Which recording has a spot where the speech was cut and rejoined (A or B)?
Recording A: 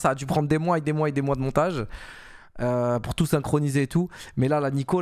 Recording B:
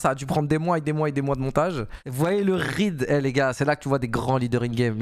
B